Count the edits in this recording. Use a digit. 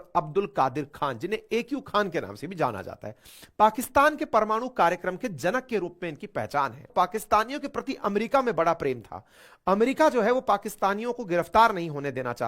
1